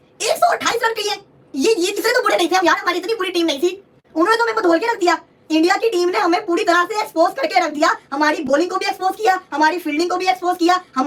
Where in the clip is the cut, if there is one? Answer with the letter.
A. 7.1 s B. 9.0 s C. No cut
C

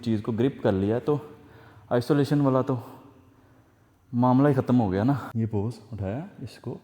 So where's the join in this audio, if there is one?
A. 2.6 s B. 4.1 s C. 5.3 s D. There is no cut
C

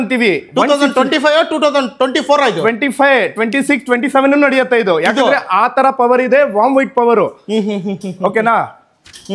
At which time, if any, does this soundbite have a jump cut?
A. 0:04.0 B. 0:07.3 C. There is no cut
C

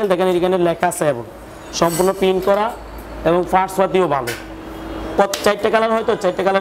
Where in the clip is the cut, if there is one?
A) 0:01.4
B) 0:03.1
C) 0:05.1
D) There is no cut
C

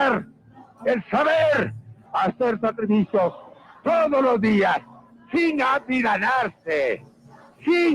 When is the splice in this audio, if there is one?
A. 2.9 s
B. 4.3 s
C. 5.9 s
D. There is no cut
B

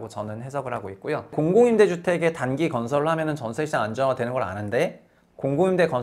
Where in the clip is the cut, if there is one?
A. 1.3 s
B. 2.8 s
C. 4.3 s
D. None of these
A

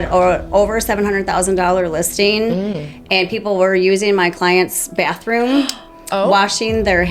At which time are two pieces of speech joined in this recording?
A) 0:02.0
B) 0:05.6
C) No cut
C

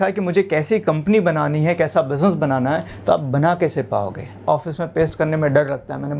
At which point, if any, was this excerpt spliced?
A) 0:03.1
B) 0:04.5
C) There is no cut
B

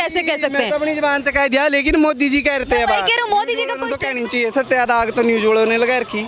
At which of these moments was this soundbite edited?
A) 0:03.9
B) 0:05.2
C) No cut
A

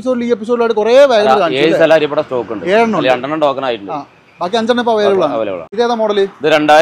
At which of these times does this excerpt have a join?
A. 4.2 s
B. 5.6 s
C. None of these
B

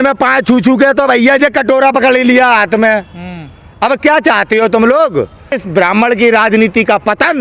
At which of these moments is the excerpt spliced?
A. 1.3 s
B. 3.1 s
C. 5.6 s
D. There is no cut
C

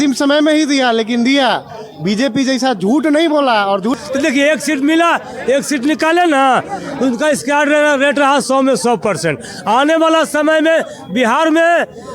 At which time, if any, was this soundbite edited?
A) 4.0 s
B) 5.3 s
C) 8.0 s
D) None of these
A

